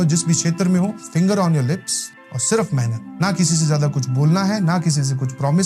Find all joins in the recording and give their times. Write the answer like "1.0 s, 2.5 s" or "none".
1.0 s